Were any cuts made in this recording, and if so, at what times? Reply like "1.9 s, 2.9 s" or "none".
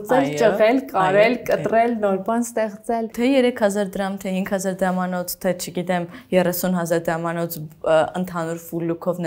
3.1 s